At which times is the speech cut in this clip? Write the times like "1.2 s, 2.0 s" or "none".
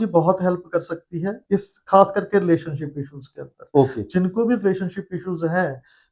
none